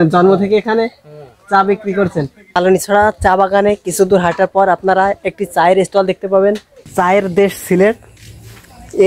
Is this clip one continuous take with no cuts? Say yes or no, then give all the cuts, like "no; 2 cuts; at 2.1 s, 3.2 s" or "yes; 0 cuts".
no; 2 cuts; at 2.6 s, 6.7 s